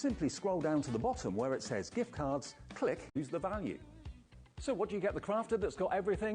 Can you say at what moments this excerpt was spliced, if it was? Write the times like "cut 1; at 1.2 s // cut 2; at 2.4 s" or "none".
cut 1; at 3.2 s